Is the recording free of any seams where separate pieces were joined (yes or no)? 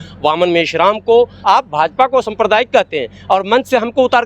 no